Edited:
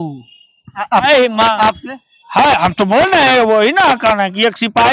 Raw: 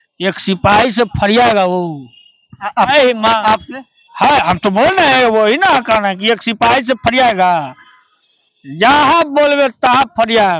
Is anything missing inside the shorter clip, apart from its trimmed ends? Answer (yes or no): no